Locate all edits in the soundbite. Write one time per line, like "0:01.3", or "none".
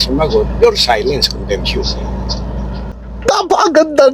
0:03.1